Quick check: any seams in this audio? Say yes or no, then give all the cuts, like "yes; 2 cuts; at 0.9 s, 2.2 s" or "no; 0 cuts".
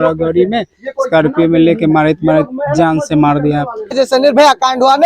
yes; 1 cut; at 3.9 s